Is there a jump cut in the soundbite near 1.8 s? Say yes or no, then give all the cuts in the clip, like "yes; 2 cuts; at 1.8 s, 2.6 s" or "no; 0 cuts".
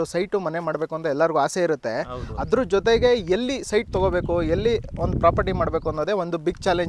no; 0 cuts